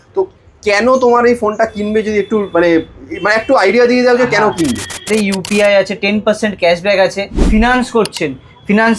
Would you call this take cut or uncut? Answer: cut